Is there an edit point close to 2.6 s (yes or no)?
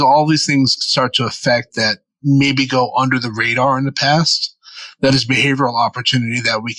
no